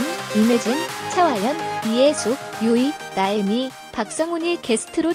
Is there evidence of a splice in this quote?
no; 0 cuts

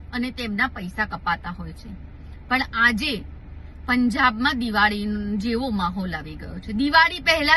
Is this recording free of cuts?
yes; 0 cuts

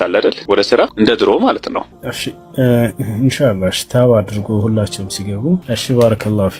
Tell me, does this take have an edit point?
no; 0 cuts

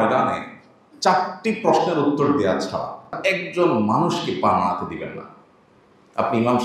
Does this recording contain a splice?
yes; 1 cut; at 3.2 s

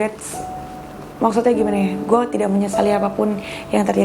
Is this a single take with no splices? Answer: yes; 0 cuts

